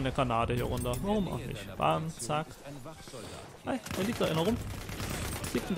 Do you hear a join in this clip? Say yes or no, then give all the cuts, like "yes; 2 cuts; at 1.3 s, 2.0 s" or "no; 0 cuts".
no; 0 cuts